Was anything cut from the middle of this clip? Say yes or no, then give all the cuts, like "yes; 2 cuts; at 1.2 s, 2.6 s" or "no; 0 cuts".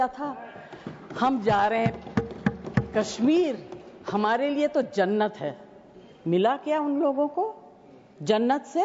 no; 0 cuts